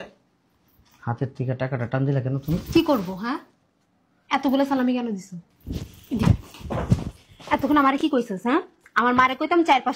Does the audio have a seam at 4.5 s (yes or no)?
no